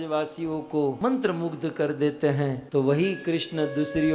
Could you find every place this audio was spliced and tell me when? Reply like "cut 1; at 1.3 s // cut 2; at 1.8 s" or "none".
cut 1; at 1.0 s // cut 2; at 2.6 s